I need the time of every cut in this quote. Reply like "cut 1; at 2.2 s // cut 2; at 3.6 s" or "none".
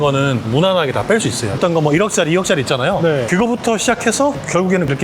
cut 1; at 1.6 s